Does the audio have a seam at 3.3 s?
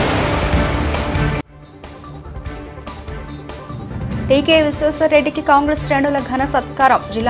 yes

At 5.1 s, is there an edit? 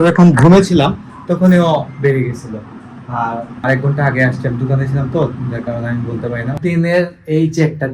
no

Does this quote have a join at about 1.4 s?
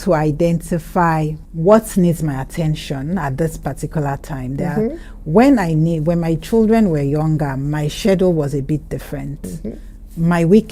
yes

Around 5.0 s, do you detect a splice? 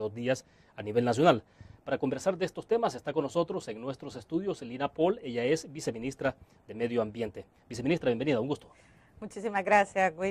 yes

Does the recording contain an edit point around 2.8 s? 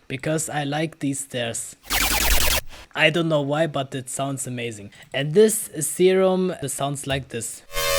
no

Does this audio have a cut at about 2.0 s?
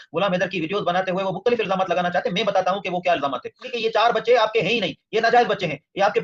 no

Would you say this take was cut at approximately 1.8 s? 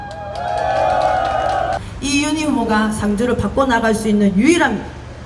yes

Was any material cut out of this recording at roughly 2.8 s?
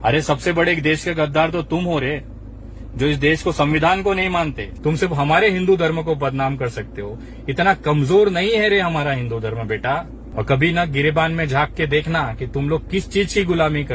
no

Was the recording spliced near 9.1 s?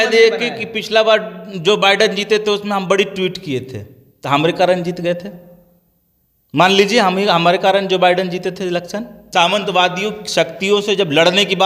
yes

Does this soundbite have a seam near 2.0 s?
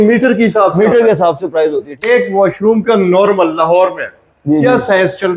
yes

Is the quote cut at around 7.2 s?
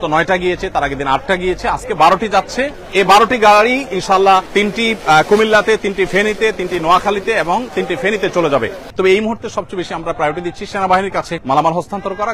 no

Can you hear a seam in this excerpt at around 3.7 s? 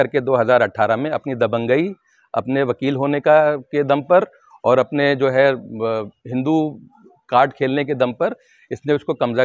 no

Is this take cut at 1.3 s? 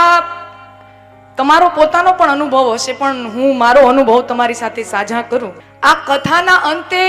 no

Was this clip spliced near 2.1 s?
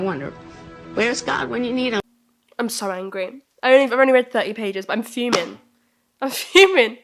yes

